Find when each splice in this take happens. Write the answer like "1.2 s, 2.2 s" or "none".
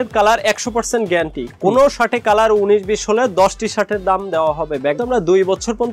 5.0 s